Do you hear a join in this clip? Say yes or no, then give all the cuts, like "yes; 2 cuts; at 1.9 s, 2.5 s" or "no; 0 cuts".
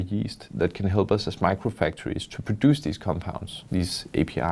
yes; 1 cut; at 3.5 s